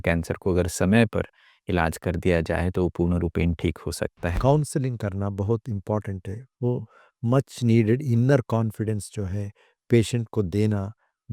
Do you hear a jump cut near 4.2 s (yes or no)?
yes